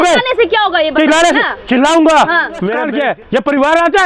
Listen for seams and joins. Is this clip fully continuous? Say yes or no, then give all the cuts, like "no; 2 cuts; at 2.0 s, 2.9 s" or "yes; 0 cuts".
no; 1 cut; at 2.8 s